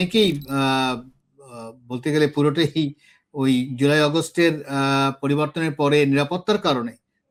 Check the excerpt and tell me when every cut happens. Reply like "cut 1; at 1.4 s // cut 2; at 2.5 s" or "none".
none